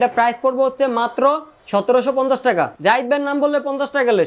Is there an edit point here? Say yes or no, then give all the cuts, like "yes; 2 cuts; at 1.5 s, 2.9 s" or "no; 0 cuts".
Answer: yes; 2 cuts; at 1.5 s, 2.7 s